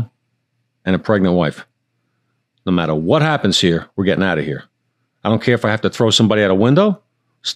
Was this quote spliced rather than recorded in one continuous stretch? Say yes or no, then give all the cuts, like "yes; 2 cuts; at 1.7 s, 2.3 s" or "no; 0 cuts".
no; 0 cuts